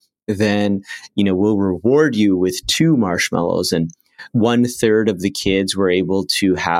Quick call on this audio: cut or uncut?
cut